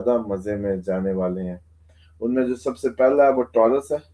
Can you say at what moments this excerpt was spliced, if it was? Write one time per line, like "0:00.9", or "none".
none